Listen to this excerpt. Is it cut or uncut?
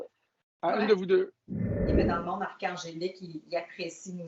cut